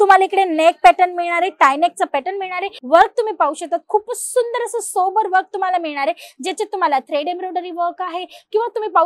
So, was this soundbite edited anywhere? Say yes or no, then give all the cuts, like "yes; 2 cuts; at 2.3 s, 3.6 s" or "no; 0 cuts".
yes; 1 cut; at 2.8 s